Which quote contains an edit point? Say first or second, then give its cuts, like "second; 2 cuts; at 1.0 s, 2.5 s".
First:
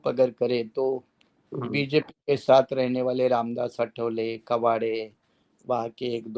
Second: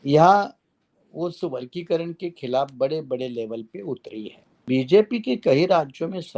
second; 1 cut; at 4.6 s